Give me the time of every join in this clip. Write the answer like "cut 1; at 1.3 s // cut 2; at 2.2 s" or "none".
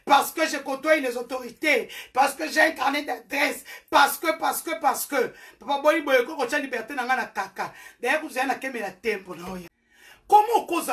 cut 1; at 9.7 s